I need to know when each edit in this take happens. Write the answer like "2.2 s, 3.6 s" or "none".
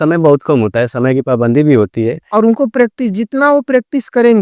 2.2 s